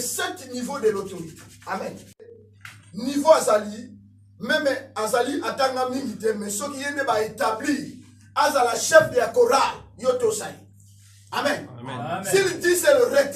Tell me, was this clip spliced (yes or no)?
yes